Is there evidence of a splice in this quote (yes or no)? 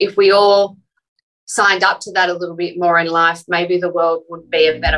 no